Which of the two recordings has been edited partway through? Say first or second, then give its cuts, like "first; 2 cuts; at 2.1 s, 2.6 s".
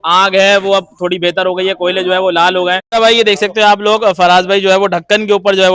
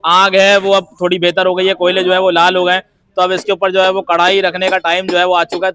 first; 1 cut; at 2.8 s